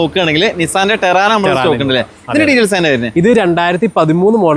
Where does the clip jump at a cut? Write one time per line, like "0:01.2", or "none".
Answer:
none